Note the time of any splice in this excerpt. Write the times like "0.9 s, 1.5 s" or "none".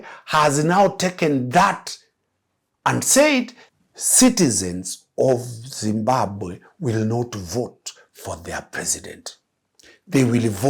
3.6 s